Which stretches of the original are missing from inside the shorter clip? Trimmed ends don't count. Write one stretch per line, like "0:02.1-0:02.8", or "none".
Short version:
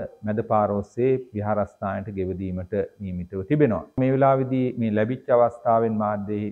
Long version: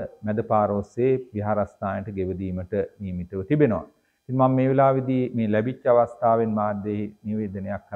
0:04.0-0:04.5